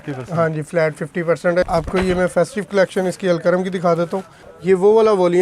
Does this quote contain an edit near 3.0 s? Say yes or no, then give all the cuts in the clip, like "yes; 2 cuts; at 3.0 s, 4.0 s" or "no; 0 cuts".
no; 2 cuts; at 1.7 s, 4.3 s